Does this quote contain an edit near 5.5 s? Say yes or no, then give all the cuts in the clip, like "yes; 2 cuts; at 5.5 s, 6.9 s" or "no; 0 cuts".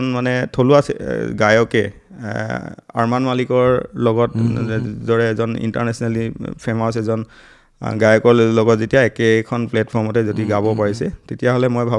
no; 0 cuts